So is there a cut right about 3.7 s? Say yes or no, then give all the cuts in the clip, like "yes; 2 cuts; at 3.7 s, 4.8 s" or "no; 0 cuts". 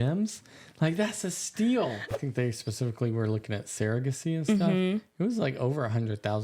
no; 1 cut; at 2.1 s